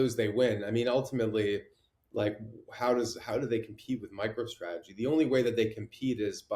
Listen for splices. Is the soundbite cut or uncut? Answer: uncut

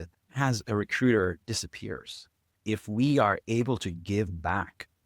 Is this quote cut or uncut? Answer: cut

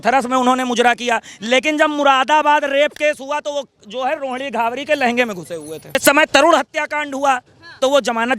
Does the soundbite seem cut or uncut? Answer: cut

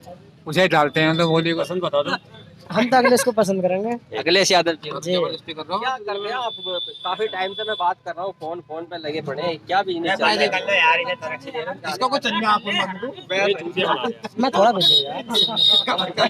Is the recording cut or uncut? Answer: cut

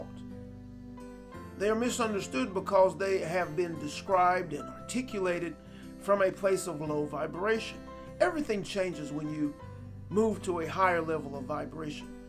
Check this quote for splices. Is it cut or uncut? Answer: uncut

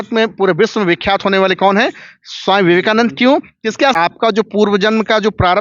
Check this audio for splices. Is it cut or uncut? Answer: cut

